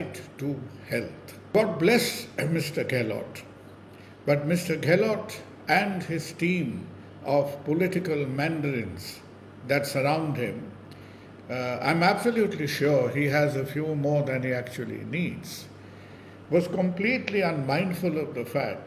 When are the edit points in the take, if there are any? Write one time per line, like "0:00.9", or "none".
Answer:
0:01.5